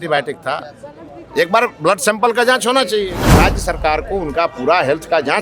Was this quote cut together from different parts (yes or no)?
yes